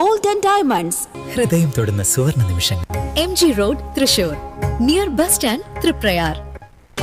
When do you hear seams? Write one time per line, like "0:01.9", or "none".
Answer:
none